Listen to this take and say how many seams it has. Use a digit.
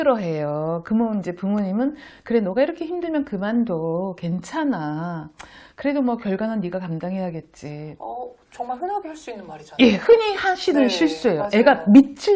0